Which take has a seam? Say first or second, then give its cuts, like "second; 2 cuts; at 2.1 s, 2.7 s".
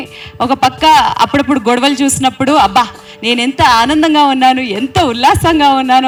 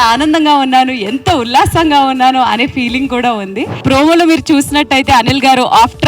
second; 1 cut; at 3.8 s